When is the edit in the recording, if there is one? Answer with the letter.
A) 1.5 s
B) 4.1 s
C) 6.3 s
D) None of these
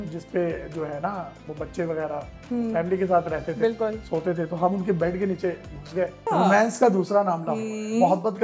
C